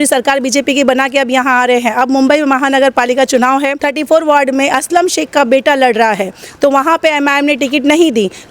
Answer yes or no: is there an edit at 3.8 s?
yes